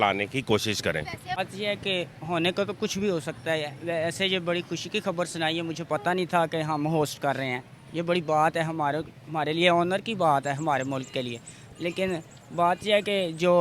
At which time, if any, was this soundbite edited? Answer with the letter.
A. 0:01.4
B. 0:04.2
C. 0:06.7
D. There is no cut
A